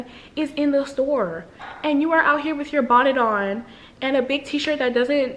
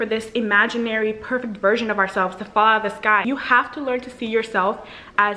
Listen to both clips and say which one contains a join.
second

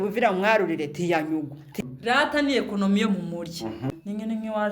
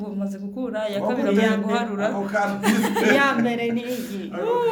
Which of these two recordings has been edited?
first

